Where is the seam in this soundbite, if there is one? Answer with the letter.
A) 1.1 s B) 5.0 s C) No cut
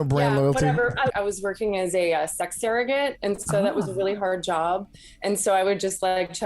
A